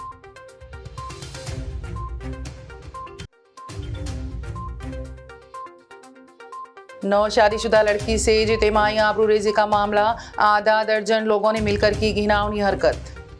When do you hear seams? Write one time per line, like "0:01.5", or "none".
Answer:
0:01.0

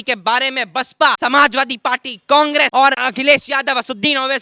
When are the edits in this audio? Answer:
0:01.2
0:03.1

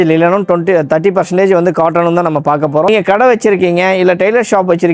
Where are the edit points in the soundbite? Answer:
0:02.9

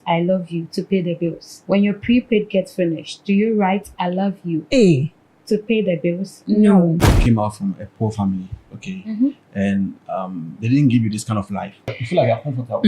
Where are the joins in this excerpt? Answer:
0:01.5
0:04.6
0:07.1
0:12.0

